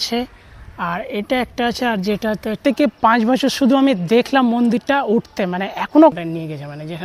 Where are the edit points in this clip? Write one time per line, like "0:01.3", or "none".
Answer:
0:02.6
0:06.1